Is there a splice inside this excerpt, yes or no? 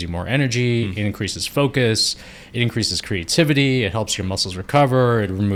no